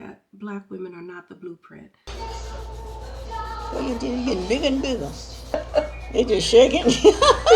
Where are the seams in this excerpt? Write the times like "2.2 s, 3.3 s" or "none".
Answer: 2.1 s

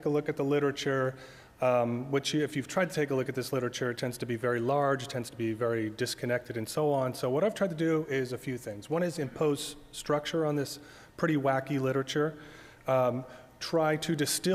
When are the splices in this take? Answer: 4.1 s

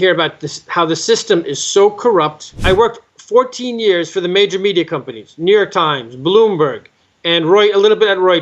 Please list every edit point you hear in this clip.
2.5 s

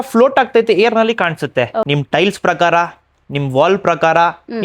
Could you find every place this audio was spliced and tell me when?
1.9 s

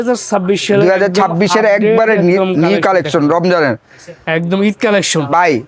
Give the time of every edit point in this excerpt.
none

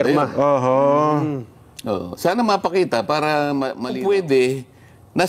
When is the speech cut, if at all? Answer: 3.9 s

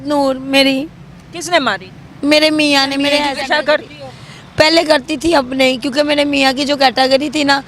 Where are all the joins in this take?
3.3 s

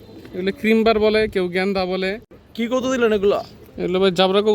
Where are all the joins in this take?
2.2 s

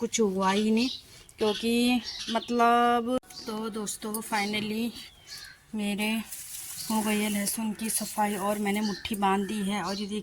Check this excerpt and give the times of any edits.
3.2 s

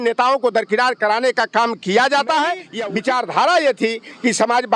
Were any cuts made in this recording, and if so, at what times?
2.7 s

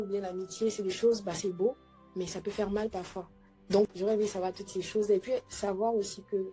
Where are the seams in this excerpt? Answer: 3.9 s

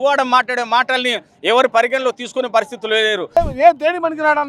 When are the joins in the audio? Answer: 3.4 s

